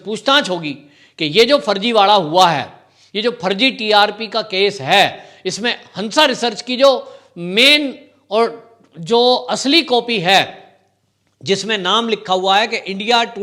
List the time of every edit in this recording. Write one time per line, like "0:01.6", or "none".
none